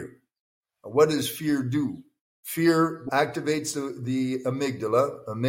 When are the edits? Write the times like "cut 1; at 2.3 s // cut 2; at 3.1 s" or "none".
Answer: cut 1; at 3.1 s